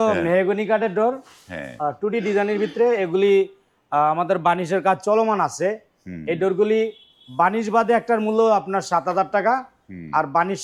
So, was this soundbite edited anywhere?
no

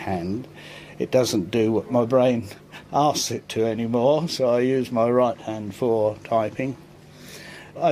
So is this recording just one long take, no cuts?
yes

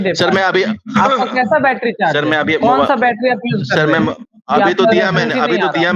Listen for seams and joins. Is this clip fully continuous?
yes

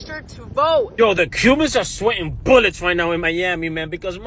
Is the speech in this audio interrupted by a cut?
yes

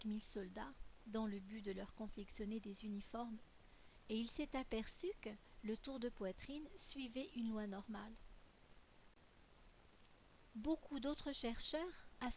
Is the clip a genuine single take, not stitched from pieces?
no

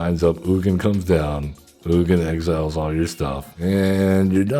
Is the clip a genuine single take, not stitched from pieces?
no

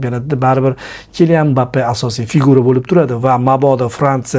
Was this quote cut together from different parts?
no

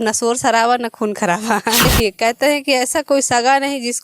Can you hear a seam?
yes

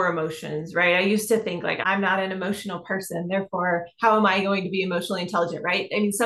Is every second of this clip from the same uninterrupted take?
no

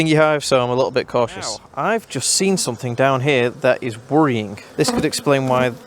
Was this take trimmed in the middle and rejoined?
yes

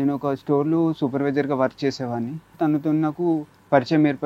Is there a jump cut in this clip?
yes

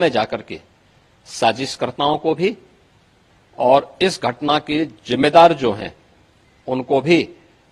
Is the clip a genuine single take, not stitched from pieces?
yes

